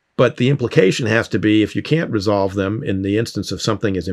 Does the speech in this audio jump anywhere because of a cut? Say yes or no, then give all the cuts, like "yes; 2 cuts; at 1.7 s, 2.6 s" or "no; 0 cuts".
no; 0 cuts